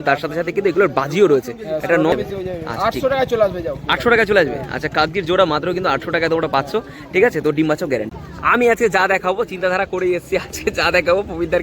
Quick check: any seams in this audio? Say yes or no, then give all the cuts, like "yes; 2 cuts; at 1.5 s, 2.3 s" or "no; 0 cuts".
yes; 2 cuts; at 2.1 s, 8.1 s